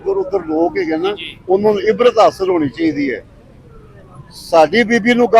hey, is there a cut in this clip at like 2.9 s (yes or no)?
no